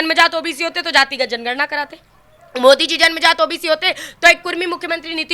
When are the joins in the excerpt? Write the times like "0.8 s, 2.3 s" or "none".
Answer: none